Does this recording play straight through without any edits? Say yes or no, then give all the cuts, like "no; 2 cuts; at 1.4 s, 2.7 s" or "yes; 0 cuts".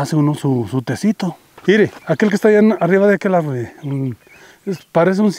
no; 1 cut; at 1.5 s